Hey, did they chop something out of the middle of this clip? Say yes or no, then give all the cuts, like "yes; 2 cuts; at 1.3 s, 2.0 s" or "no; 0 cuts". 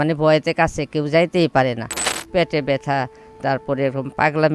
yes; 1 cut; at 2.0 s